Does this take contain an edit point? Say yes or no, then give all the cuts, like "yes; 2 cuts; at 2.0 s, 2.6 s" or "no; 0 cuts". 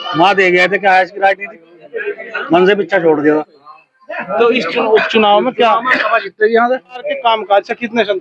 yes; 1 cut; at 7.2 s